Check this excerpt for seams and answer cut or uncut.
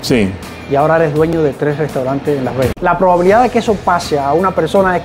cut